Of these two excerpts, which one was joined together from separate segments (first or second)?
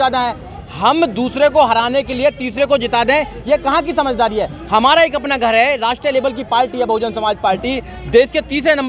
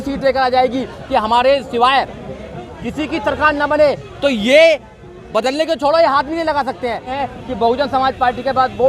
second